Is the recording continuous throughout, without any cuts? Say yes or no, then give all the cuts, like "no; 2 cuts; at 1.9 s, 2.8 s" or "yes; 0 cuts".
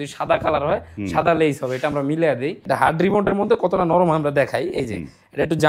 no; 1 cut; at 2.6 s